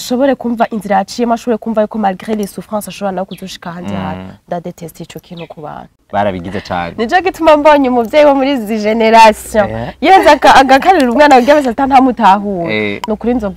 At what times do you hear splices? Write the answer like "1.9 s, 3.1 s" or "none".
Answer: 5.9 s